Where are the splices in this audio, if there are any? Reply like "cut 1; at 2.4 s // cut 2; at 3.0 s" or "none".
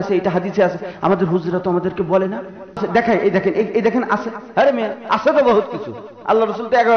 cut 1; at 2.8 s

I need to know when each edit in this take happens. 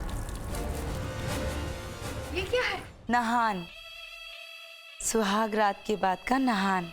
cut 1; at 1.0 s

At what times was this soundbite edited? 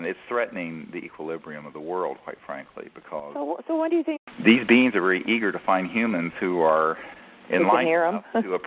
none

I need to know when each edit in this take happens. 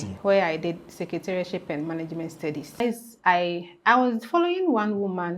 cut 1; at 2.8 s

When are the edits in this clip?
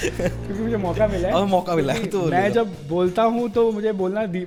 none

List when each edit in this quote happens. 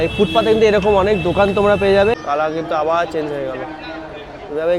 cut 1; at 2.2 s

